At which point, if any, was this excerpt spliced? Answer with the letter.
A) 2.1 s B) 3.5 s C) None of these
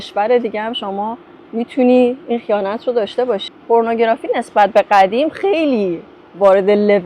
B